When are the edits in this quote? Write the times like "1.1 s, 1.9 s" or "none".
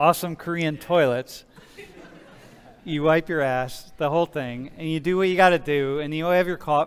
none